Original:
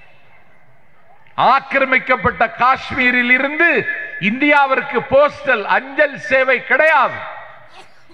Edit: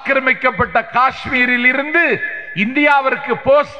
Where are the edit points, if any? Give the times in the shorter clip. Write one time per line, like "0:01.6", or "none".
none